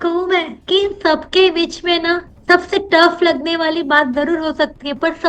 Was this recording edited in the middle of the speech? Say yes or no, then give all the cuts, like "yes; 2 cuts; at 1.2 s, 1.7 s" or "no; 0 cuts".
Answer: no; 0 cuts